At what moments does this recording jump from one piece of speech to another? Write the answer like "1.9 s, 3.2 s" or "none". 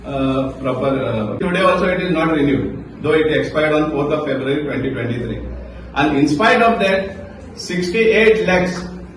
1.4 s